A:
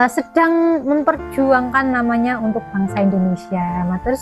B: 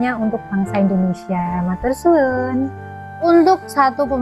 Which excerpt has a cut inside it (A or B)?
B